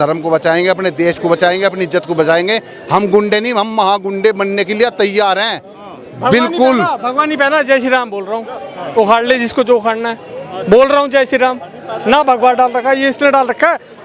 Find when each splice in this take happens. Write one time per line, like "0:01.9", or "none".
none